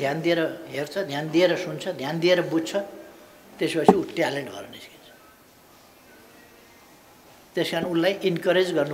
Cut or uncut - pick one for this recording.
uncut